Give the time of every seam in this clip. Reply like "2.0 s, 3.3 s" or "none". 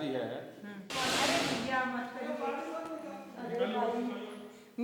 0.9 s